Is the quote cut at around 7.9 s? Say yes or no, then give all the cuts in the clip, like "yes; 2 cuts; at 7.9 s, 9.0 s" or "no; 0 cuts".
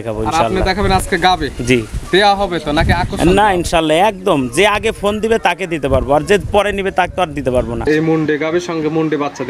yes; 1 cut; at 7.9 s